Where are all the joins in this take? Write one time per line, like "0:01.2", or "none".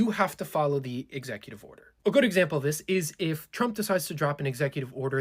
none